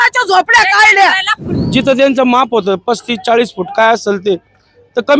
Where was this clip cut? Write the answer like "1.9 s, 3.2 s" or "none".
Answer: 1.4 s